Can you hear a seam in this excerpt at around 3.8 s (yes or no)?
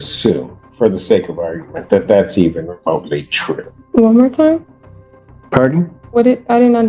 yes